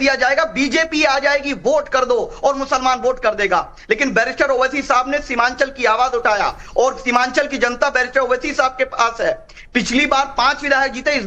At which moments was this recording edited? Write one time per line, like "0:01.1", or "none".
0:09.2